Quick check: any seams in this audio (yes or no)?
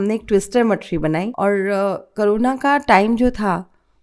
yes